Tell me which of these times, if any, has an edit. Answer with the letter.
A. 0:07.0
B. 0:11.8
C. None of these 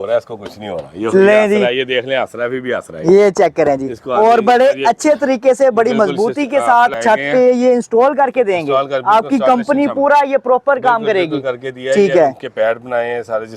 A